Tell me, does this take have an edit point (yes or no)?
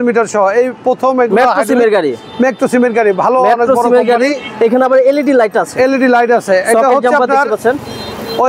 no